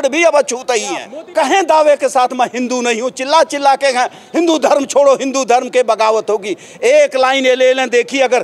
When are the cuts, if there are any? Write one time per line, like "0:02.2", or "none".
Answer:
0:01.2